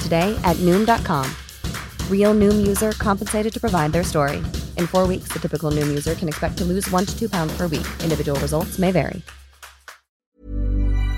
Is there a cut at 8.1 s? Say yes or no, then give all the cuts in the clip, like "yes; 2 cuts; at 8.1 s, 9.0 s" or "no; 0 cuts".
no; 1 cut; at 10.3 s